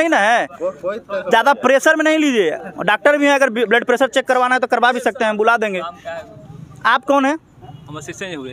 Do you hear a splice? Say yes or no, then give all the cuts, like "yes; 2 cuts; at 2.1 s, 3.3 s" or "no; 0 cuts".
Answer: no; 0 cuts